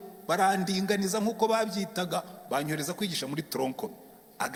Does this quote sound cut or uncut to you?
uncut